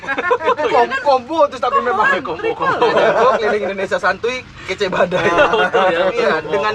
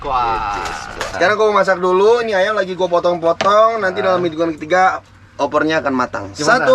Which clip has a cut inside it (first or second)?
second